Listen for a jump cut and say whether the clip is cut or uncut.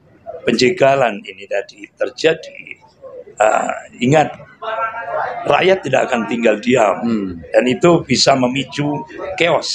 uncut